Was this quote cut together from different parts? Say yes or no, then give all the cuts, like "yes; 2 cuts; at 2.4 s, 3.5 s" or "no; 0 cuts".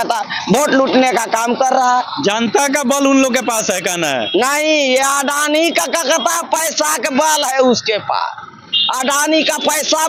no; 0 cuts